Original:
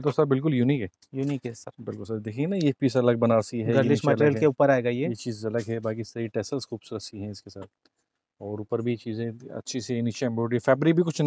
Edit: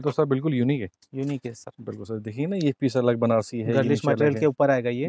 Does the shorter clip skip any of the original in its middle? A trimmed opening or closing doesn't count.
no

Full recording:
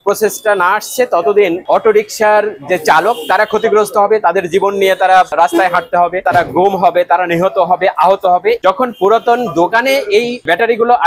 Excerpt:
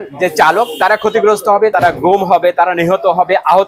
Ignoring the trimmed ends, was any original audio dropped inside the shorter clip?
yes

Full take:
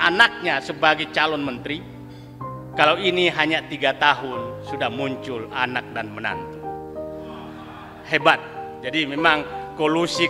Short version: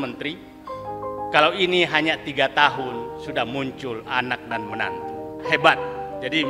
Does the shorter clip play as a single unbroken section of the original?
no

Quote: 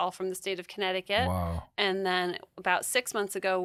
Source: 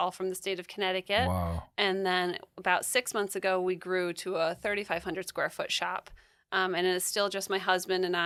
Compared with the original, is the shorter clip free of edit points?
yes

